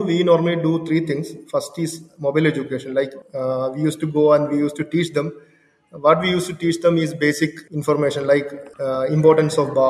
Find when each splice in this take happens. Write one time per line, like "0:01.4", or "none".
0:03.2
0:08.6

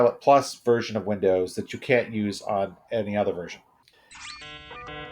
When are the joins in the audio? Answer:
0:04.0

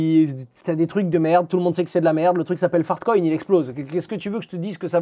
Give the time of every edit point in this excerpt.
none

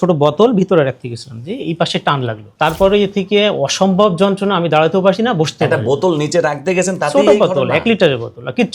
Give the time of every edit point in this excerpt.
0:02.4

